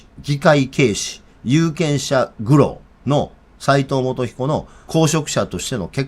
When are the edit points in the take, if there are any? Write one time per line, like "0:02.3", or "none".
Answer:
0:02.9
0:04.8